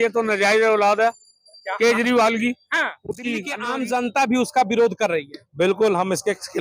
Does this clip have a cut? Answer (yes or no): yes